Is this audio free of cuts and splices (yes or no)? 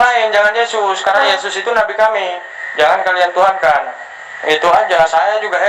yes